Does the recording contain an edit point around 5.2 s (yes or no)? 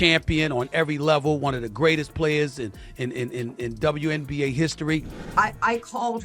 yes